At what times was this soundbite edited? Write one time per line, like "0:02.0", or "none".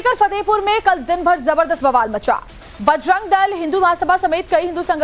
0:01.0